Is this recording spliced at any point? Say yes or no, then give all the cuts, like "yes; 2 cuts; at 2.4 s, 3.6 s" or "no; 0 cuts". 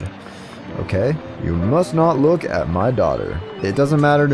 yes; 1 cut; at 3.4 s